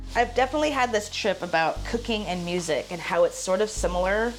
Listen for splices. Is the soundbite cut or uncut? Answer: uncut